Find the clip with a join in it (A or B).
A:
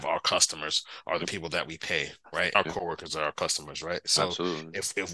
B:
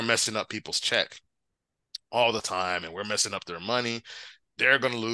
A